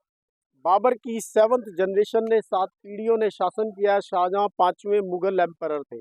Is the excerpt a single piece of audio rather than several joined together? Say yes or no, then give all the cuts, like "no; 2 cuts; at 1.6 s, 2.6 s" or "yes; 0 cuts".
yes; 0 cuts